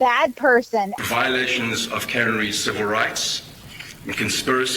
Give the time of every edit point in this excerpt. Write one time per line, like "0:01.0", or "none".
0:01.0